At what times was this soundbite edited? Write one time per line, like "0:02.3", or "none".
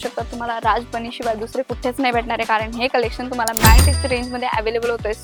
none